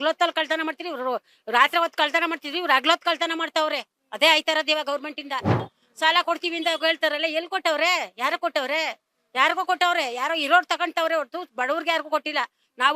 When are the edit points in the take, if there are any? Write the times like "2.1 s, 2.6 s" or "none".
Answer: 5.7 s